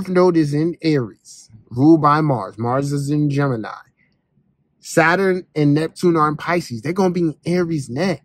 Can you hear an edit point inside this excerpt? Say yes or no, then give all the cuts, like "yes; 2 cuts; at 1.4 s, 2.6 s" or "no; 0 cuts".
no; 0 cuts